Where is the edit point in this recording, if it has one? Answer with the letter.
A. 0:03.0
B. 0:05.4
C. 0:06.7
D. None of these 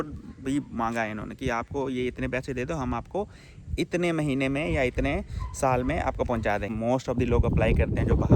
C